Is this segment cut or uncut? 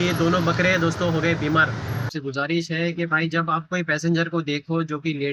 cut